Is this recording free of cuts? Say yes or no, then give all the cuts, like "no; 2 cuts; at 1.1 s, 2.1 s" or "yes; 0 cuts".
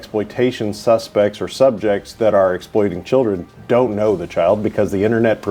yes; 0 cuts